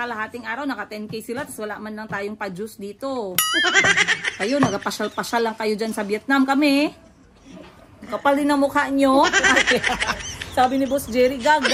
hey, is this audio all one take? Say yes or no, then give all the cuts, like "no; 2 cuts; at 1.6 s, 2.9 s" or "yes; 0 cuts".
yes; 0 cuts